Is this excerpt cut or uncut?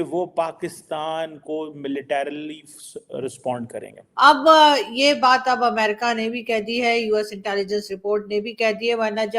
cut